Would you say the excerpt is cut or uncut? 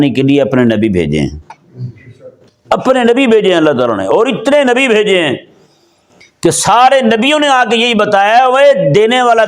uncut